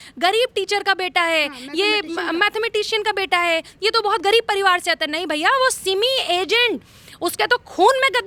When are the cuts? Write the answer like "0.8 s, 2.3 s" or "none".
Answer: none